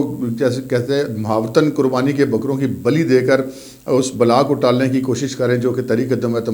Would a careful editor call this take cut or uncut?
uncut